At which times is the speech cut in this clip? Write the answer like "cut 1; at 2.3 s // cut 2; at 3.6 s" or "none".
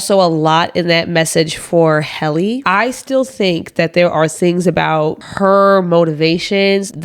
cut 1; at 2.6 s

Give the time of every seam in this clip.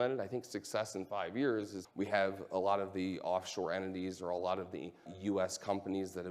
cut 1; at 1.8 s // cut 2; at 5.1 s

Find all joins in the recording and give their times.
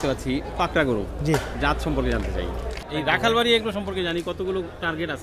cut 1; at 2.8 s

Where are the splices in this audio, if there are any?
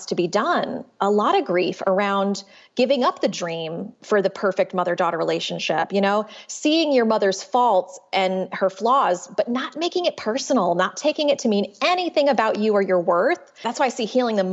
cut 1; at 13.5 s

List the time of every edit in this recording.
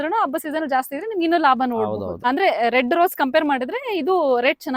cut 1; at 2.2 s

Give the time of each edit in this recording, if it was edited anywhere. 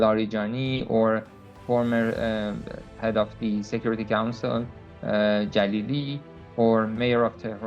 none

